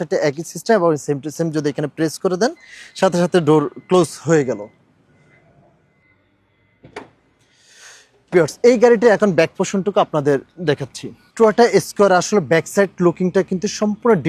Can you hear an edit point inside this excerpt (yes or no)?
no